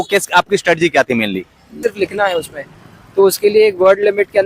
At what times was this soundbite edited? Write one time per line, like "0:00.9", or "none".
0:01.8